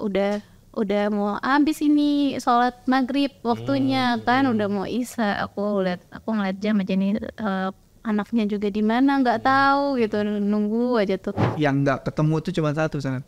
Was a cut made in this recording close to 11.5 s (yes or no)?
yes